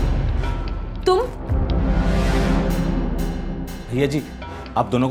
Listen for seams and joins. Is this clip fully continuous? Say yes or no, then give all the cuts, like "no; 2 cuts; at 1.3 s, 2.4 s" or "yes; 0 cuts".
yes; 0 cuts